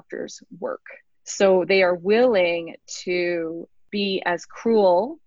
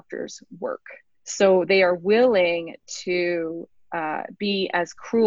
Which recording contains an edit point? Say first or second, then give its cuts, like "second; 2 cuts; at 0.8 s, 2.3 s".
first; 1 cut; at 3.8 s